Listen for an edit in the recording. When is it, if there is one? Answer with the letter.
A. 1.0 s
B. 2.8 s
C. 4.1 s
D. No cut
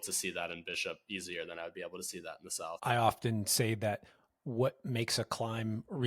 B